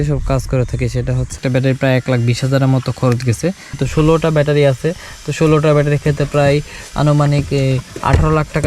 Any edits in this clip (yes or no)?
yes